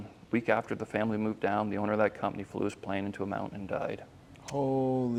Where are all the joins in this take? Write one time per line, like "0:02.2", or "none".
none